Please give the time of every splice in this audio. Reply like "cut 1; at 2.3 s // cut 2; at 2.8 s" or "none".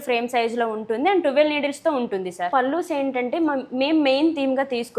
cut 1; at 2.5 s